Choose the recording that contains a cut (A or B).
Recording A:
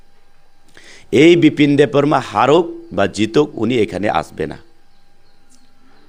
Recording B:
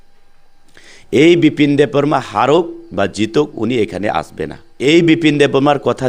B